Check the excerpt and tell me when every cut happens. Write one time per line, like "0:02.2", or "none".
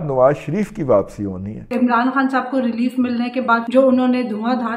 0:01.7
0:03.6

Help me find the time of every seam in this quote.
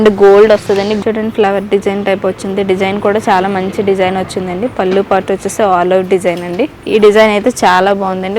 0:01.0
0:06.8

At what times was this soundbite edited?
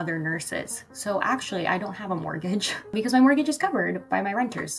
0:02.9
0:04.0

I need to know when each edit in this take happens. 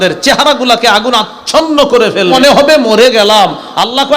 0:02.3

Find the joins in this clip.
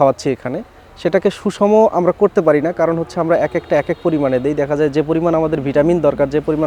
none

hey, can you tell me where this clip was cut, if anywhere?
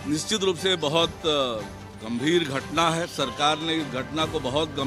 none

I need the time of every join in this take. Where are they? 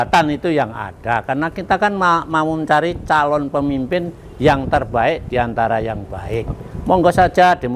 none

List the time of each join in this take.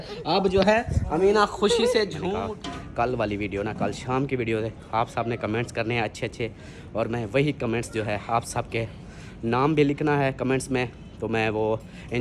0:02.3

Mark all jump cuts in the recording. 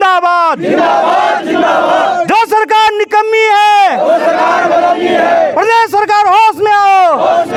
none

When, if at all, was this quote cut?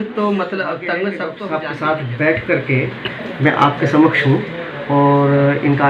0:01.3

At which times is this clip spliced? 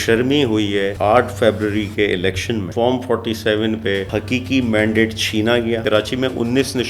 0:00.9
0:02.7
0:04.1
0:05.8

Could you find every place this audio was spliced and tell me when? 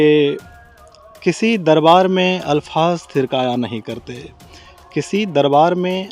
none

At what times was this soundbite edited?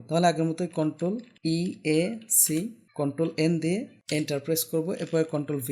0:01.3
0:02.8
0:04.0

